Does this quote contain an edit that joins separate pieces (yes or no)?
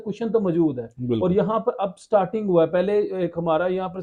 no